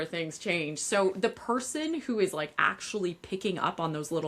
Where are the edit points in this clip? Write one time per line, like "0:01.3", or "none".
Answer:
none